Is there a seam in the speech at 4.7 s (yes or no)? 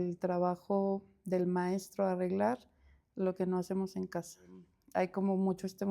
yes